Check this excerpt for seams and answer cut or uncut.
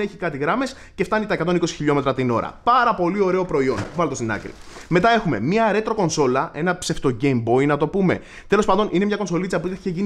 uncut